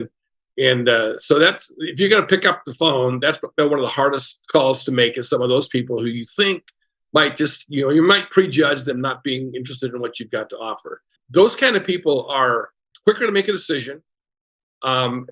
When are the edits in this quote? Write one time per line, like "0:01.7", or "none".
0:11.2
0:12.8

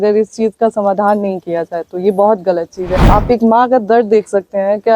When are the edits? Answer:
0:03.0

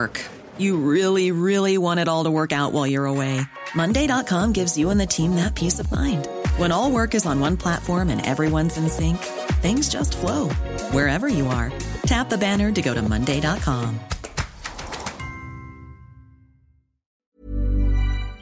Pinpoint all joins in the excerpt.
0:17.2

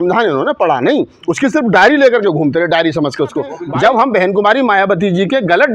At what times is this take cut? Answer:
0:03.6

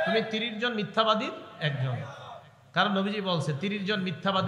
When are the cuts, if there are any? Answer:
none

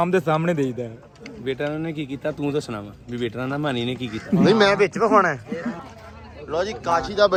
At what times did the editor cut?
none

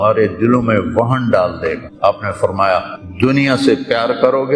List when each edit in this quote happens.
0:01.9
0:03.0

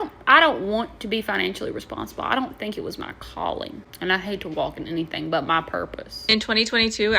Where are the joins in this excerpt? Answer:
0:03.8
0:06.1

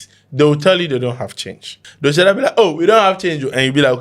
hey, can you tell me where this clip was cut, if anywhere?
0:01.8

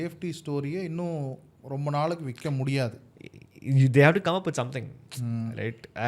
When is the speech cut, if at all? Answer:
none

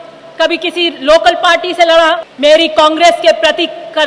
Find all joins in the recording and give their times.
0:02.3

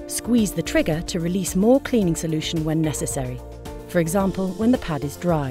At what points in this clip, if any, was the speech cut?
none

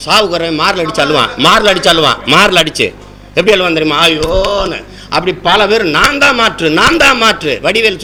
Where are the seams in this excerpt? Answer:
none

